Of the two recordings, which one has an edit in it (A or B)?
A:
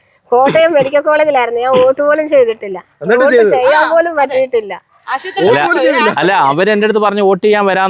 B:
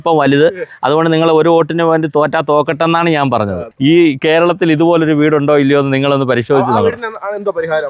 B